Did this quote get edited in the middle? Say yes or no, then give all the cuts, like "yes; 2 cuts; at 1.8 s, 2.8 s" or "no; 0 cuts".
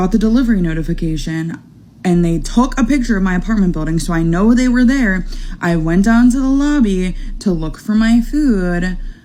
no; 0 cuts